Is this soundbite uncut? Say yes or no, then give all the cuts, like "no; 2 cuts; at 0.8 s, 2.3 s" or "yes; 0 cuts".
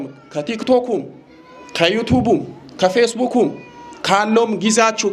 yes; 0 cuts